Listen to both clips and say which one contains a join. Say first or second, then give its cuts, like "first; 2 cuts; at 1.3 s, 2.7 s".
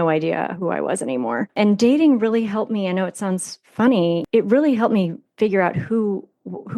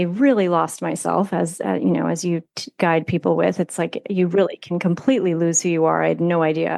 first; 2 cuts; at 1.5 s, 4.2 s